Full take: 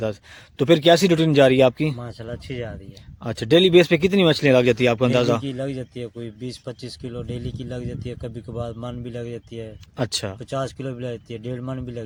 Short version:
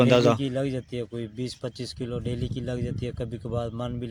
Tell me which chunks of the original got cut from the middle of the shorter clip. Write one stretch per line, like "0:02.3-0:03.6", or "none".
none

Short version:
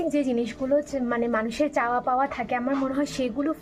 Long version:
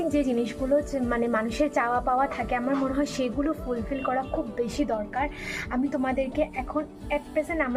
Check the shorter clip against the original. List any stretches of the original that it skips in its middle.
none

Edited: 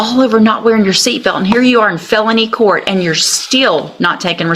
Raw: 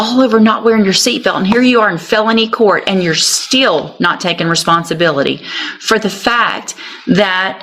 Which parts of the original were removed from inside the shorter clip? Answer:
none

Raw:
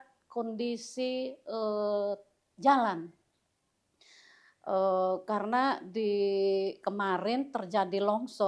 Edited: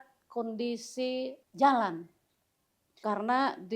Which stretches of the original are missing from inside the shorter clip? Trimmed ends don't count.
0:01.4-0:02.4
0:04.0-0:05.2

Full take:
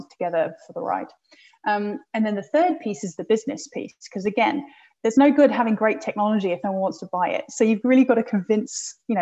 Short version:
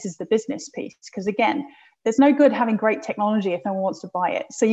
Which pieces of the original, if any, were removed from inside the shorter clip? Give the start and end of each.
none

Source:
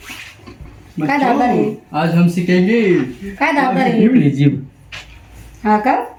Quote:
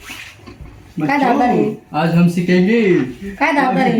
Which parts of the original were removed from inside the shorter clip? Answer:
none

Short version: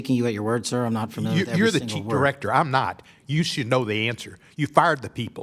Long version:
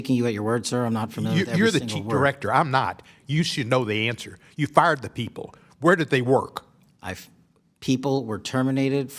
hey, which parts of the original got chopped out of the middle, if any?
none

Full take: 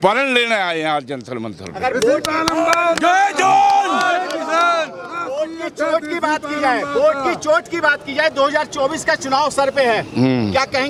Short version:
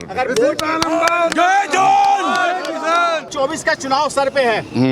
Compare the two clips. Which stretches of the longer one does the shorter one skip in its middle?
0:04.9-0:08.7

